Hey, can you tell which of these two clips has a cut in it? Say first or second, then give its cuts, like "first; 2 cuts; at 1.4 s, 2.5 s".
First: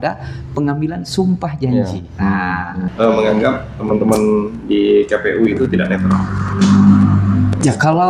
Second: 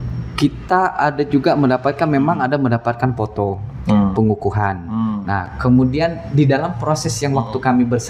first; 1 cut; at 2.8 s